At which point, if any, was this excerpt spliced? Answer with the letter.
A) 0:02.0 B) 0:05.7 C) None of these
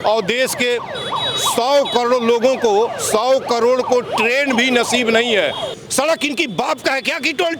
B